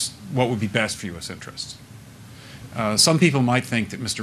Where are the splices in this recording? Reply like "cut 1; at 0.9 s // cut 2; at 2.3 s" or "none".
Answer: cut 1; at 2.1 s